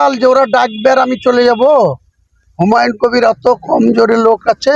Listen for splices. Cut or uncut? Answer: uncut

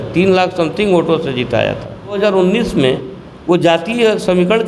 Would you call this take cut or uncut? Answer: cut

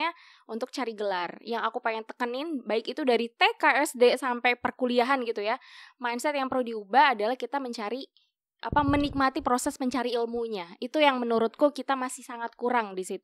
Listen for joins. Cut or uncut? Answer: uncut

